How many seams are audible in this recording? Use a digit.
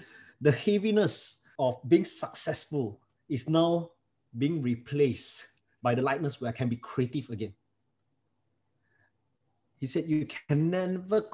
1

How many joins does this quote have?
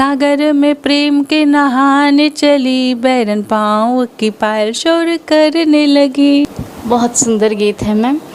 0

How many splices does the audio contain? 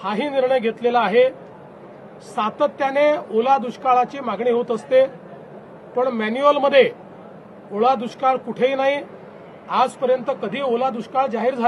0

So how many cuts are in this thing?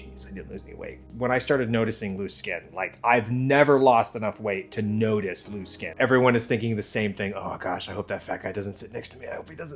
2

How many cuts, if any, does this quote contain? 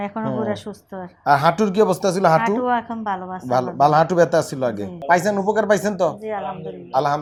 0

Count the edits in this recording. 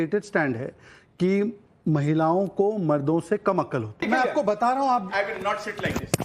1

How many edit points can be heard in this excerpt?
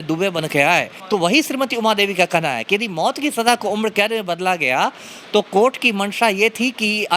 1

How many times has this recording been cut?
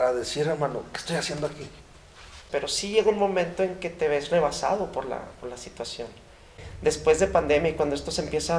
2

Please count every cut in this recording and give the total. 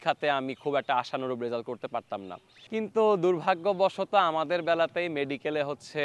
1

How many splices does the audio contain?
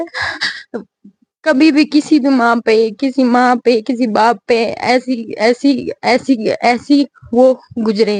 0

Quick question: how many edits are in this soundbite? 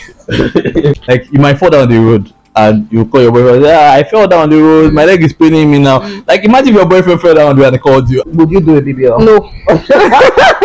2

